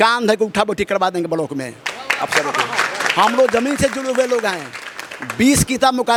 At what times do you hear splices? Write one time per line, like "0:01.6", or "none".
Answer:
none